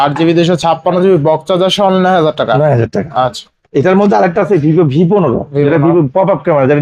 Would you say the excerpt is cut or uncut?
uncut